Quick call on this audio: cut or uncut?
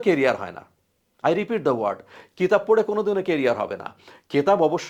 uncut